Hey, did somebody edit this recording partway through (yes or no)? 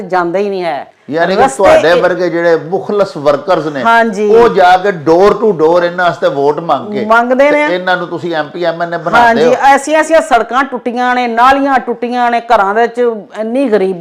no